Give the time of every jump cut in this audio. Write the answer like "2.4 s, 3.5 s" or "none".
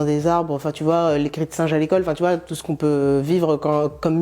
none